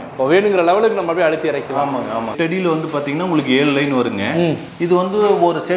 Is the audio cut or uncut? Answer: cut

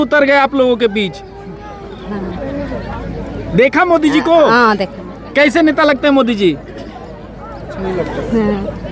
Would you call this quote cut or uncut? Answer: uncut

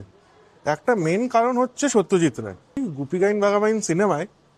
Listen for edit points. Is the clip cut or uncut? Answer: cut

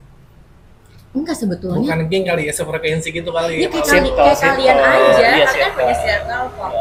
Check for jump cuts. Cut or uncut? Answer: uncut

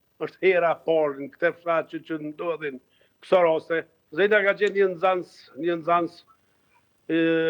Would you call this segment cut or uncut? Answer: cut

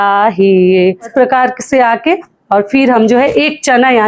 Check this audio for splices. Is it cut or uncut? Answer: cut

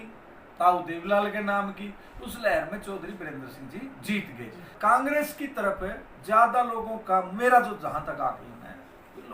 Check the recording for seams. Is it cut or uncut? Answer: cut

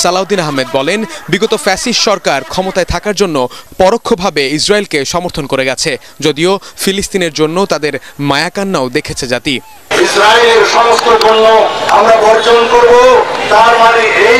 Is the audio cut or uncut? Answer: uncut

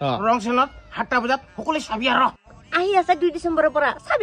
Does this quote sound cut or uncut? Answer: cut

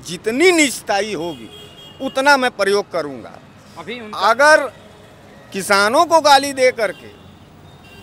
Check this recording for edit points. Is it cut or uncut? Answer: uncut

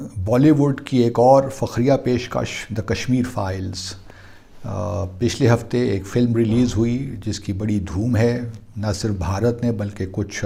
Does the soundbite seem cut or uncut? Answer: uncut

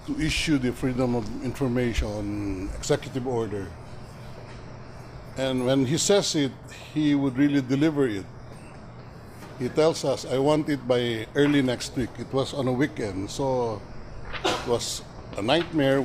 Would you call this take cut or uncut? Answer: cut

